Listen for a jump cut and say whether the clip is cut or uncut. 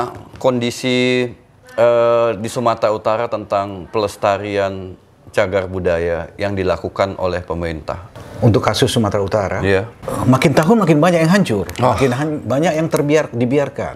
cut